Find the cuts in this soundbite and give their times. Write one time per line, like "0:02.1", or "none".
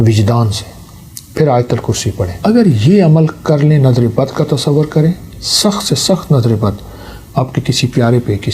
0:02.3